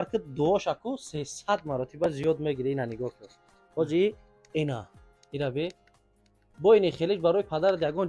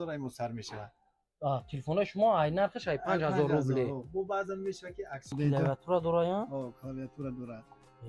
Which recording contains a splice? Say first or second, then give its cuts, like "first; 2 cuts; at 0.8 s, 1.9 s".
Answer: second; 1 cut; at 5.4 s